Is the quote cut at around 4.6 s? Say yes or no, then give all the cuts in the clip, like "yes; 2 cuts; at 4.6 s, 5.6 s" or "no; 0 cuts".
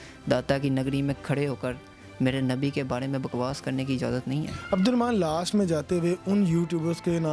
no; 0 cuts